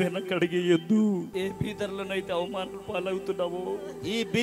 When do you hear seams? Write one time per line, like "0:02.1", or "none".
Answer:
0:01.3